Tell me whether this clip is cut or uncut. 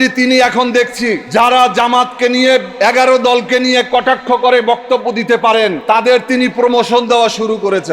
cut